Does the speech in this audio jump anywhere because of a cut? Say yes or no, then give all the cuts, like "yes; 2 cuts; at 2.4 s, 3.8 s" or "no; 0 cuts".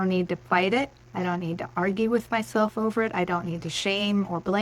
yes; 1 cut; at 1.0 s